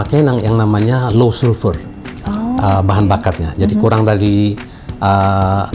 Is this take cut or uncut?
uncut